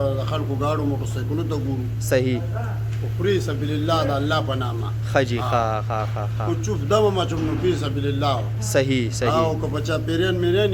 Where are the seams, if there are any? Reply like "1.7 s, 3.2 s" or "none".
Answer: none